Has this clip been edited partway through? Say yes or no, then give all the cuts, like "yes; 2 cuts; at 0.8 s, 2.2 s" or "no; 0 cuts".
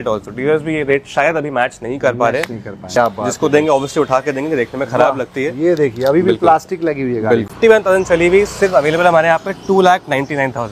yes; 2 cuts; at 2.9 s, 7.5 s